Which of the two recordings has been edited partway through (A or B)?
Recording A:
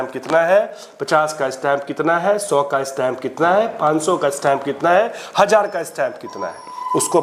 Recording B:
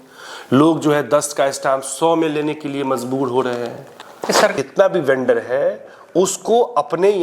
B